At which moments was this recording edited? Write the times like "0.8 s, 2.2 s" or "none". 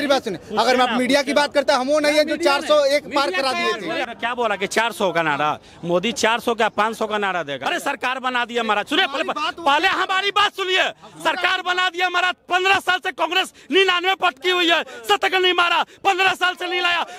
4.0 s, 7.6 s